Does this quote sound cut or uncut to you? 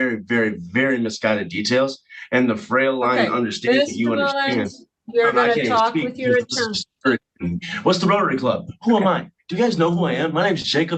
uncut